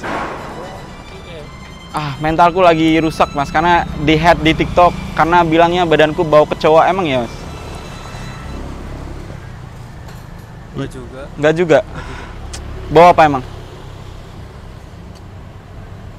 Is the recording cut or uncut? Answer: uncut